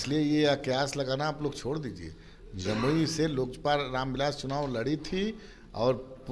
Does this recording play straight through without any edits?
yes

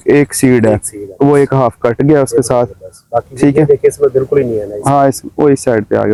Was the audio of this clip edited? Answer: no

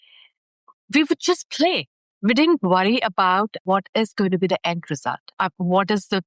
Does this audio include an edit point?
yes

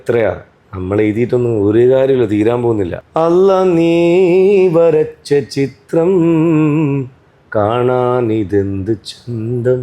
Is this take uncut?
no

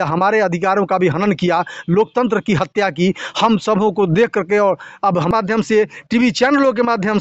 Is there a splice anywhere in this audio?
yes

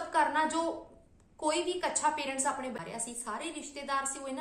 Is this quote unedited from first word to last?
no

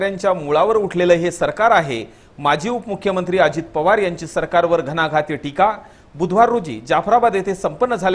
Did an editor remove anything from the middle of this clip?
no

